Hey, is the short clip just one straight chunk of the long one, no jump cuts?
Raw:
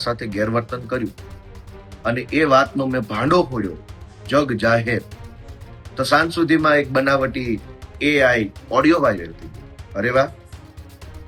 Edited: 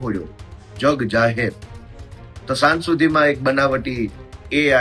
yes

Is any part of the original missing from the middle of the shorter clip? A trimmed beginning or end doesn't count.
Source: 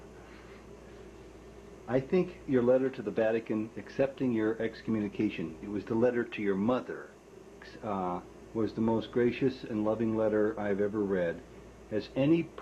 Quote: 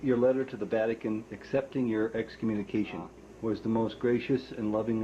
yes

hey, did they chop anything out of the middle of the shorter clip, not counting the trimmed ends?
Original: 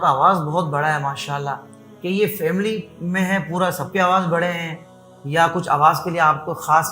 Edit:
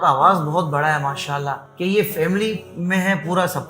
yes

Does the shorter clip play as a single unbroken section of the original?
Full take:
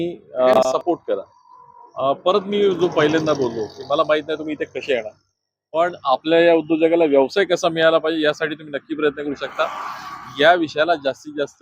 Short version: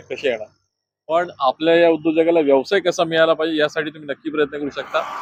yes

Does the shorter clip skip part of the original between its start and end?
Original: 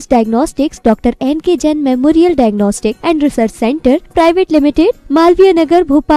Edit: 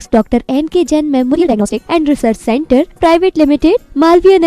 yes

